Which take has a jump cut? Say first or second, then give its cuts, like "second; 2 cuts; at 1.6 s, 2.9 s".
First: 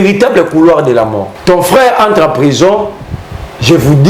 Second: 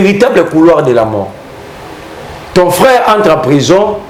first; 1 cut; at 1.3 s